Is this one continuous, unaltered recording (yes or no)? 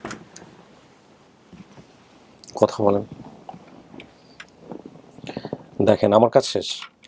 yes